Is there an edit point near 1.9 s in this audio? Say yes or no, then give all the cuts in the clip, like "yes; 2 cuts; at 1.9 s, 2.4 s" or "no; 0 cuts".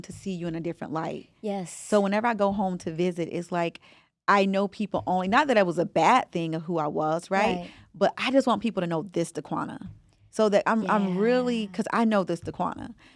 no; 0 cuts